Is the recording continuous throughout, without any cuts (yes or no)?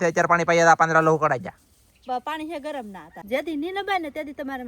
no